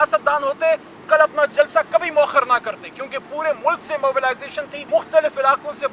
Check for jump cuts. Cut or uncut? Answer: cut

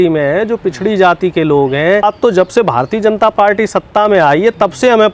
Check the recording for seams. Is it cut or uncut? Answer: cut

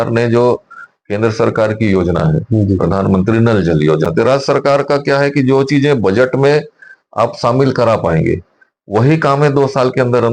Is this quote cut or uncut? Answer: cut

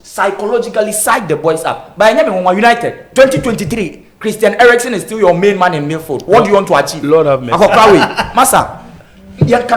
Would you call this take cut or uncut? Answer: uncut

